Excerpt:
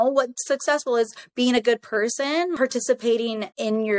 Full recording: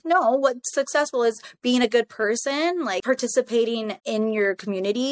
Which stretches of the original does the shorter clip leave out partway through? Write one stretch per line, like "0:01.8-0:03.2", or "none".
0:02.8-0:03.0